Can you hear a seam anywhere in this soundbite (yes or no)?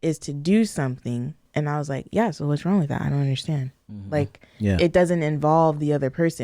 yes